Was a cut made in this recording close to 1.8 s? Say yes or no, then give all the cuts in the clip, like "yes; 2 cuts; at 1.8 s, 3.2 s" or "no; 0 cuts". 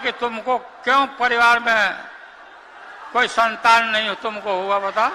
no; 0 cuts